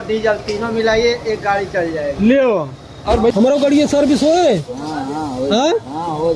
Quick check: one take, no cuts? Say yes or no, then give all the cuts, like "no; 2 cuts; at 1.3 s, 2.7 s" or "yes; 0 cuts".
no; 1 cut; at 3.3 s